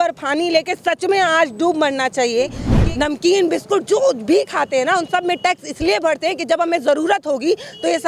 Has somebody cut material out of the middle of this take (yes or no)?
yes